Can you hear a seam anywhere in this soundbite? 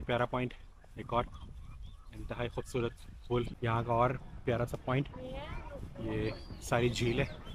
yes; 1 cut; at 3.5 s

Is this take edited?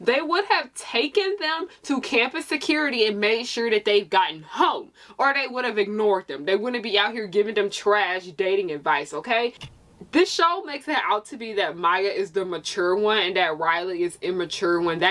yes; 1 cut; at 9.6 s

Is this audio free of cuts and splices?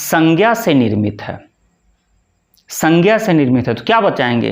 yes; 0 cuts

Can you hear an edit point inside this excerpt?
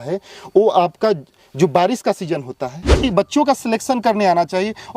yes; 1 cut; at 3.0 s

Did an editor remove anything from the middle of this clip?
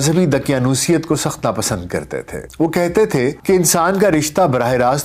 yes; 2 cuts; at 2.4 s, 3.4 s

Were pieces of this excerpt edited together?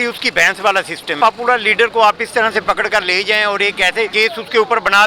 yes; 2 cuts; at 1.1 s, 4.1 s

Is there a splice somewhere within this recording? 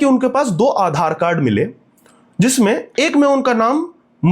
no; 0 cuts

